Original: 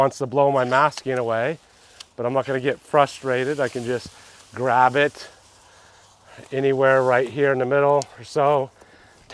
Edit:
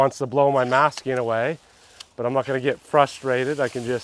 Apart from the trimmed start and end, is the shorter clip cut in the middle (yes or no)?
no